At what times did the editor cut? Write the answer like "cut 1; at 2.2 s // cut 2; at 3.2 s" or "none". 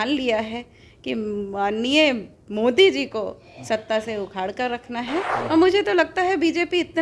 cut 1; at 5.3 s